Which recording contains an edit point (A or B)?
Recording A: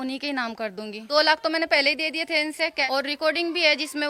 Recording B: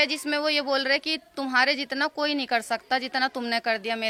A